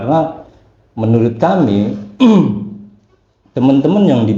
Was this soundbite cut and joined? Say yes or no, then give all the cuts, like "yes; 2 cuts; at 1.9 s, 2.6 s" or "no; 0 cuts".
no; 0 cuts